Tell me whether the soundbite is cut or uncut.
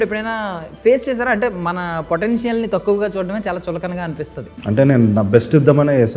cut